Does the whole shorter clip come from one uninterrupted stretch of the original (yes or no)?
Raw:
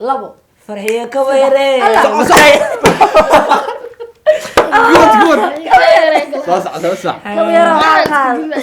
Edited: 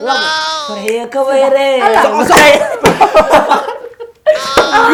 yes